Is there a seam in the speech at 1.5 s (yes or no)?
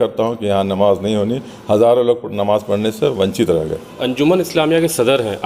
no